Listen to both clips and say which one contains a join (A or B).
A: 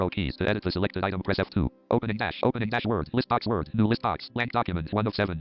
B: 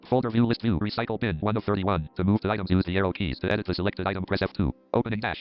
A